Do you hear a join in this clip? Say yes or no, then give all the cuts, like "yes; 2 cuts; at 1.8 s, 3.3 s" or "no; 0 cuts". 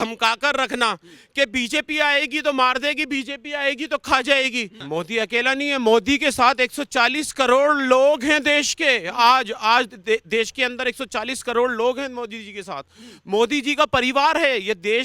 yes; 1 cut; at 4.8 s